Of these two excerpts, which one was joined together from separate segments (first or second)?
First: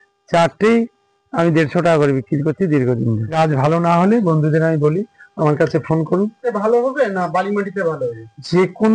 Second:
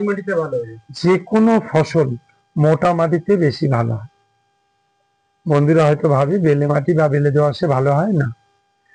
first